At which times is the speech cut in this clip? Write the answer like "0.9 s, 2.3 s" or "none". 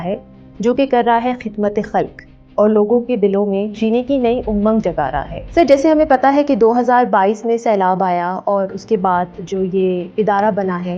5.3 s